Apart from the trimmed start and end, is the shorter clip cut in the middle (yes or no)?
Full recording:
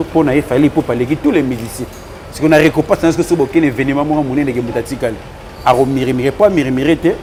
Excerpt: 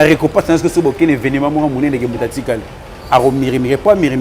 no